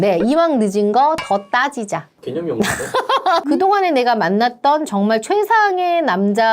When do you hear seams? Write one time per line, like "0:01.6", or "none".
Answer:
0:03.5